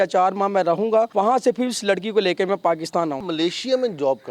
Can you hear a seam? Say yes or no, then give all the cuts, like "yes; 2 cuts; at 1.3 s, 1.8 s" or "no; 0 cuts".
yes; 2 cuts; at 1.1 s, 3.2 s